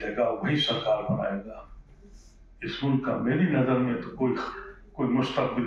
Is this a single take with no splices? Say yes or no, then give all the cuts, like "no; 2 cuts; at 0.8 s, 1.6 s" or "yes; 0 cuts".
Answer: yes; 0 cuts